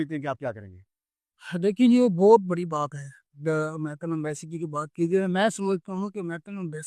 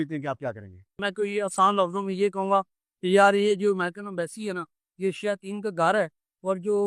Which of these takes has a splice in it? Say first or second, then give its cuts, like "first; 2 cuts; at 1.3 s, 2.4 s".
second; 1 cut; at 0.9 s